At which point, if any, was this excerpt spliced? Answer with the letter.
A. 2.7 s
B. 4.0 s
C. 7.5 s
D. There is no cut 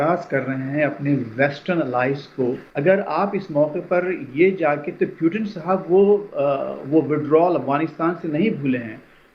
A